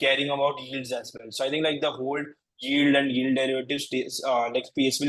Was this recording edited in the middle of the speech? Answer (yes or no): no